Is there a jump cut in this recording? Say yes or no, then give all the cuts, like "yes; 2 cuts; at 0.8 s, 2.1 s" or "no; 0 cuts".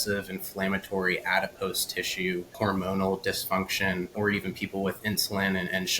yes; 2 cuts; at 2.5 s, 4.1 s